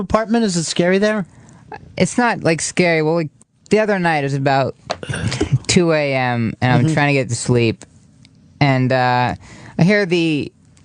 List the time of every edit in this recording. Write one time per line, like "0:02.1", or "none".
0:09.7

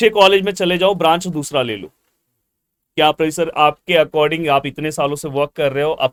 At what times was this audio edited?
none

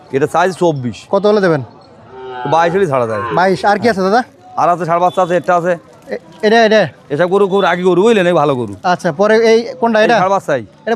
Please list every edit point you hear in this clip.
none

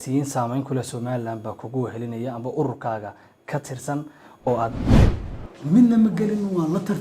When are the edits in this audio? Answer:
0:04.9

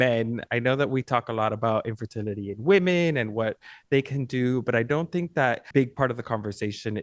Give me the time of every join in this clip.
0:05.6

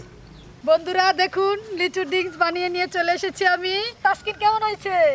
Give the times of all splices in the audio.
0:04.0

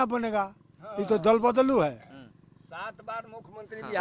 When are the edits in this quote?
none

